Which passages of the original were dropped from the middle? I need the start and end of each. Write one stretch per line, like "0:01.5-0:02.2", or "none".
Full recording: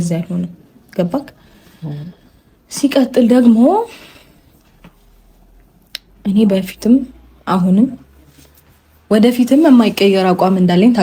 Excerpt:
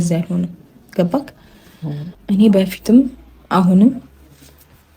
0:02.1-0:06.1